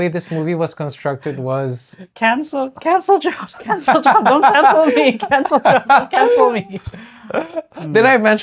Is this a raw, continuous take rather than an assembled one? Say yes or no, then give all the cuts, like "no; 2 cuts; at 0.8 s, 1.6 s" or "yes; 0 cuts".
yes; 0 cuts